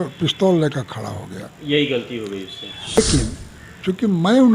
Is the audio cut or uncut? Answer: cut